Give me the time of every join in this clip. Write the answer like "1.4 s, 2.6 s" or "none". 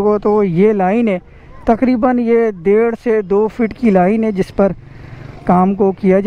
none